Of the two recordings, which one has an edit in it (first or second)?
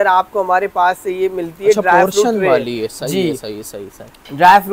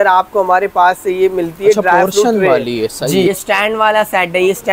second